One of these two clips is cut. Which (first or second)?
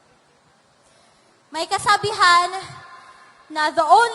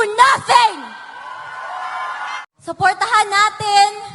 second